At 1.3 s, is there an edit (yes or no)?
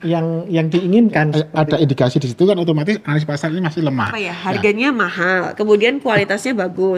yes